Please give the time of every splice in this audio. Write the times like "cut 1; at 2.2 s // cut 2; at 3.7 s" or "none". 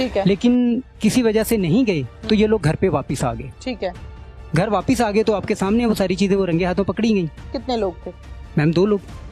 cut 1; at 4.3 s // cut 2; at 7.5 s